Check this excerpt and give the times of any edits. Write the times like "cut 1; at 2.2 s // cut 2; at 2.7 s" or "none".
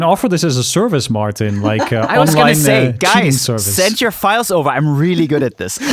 none